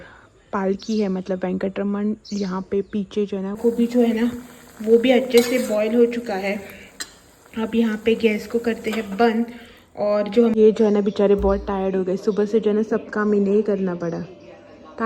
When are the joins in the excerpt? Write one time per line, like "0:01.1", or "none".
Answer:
0:03.6
0:10.5